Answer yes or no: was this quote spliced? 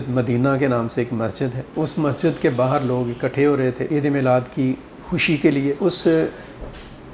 yes